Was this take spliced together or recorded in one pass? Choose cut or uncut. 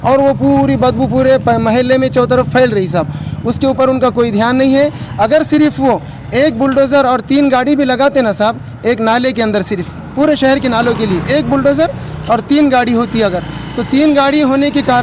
uncut